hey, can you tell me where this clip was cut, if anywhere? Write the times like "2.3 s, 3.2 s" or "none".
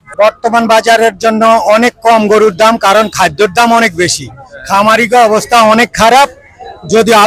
none